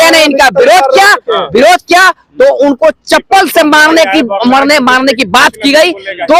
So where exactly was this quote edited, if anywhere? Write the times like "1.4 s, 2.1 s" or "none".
none